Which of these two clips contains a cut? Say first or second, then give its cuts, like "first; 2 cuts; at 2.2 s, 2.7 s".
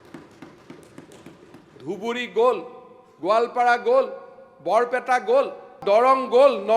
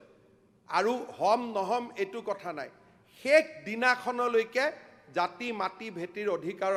first; 1 cut; at 5.8 s